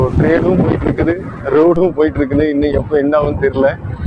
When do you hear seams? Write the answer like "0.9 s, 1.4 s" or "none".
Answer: none